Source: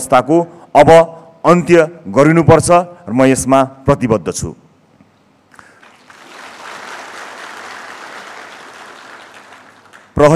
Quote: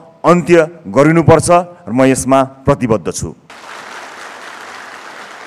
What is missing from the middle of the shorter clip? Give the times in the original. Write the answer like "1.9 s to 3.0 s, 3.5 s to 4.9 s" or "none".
4.7 s to 6.5 s

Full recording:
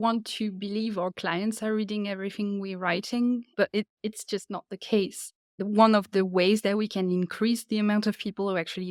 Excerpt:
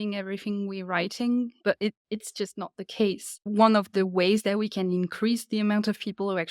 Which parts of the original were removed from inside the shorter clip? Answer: 5.3 s to 5.5 s

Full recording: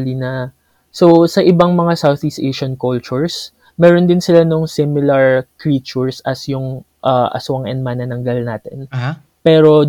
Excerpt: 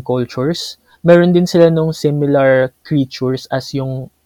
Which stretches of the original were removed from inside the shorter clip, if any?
none

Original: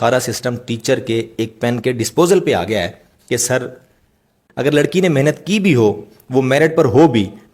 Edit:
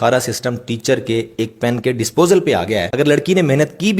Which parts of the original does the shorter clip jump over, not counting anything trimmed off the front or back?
2.9 s to 4.6 s

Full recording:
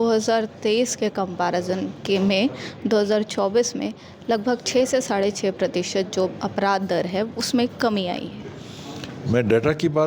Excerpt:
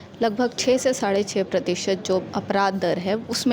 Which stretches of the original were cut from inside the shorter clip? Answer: none

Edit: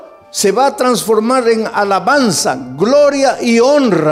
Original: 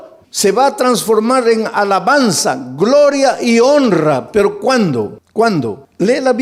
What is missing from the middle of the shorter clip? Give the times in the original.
none

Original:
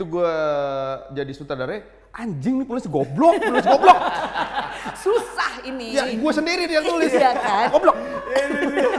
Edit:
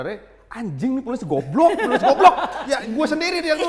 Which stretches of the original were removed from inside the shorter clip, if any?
4.2 s to 5.8 s

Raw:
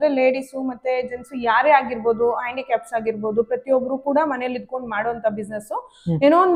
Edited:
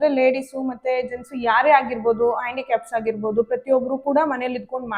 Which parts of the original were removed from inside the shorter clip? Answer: none

